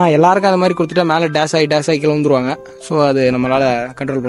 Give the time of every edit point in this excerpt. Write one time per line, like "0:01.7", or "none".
none